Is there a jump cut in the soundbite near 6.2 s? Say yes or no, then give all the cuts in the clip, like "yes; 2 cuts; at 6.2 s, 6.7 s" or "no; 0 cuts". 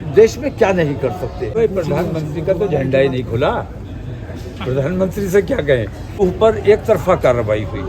yes; 2 cuts; at 1.5 s, 6.2 s